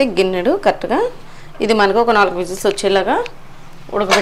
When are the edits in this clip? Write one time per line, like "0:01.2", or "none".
none